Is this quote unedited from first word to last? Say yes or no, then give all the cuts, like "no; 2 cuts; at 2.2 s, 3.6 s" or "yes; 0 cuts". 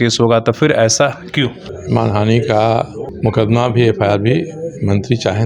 no; 2 cuts; at 1.7 s, 3.1 s